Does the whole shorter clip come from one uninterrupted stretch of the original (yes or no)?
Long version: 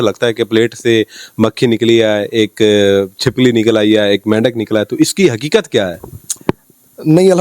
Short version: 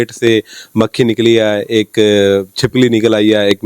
yes